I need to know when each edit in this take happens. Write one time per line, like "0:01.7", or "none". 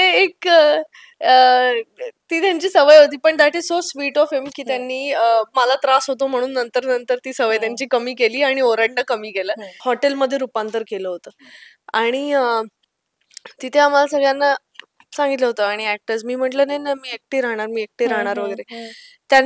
0:09.7